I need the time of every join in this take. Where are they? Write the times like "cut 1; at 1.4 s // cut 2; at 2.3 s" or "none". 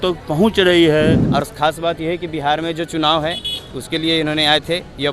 cut 1; at 1.2 s